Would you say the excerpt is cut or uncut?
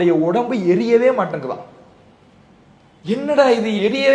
uncut